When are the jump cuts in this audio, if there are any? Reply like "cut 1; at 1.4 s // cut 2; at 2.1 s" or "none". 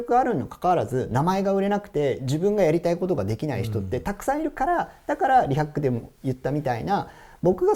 none